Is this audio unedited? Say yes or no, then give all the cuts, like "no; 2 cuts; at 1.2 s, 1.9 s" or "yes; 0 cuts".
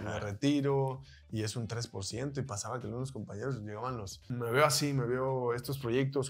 no; 1 cut; at 4.2 s